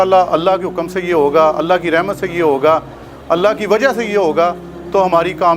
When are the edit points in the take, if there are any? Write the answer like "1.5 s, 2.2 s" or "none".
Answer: none